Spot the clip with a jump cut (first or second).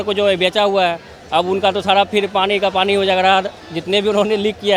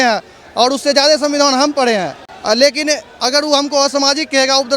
second